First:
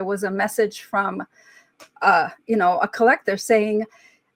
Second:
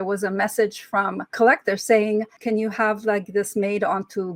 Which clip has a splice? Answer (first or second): second